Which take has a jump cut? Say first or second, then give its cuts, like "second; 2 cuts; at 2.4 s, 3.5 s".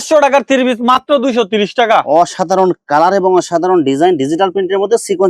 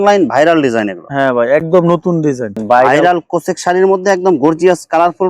second; 1 cut; at 2.5 s